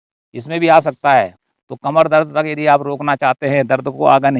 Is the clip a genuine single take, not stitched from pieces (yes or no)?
no